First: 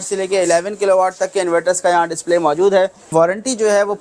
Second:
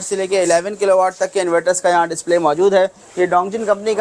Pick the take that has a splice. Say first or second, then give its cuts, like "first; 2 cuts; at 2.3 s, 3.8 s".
first; 1 cut; at 3.1 s